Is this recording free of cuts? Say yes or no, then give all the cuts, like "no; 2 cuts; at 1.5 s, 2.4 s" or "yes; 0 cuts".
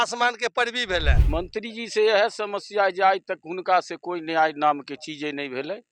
no; 1 cut; at 1.2 s